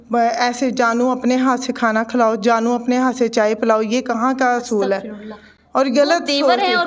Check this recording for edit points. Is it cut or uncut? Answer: uncut